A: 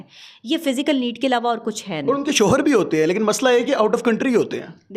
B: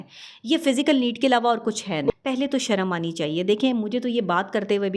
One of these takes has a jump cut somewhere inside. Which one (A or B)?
B